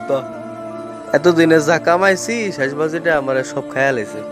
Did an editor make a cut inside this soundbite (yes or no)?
no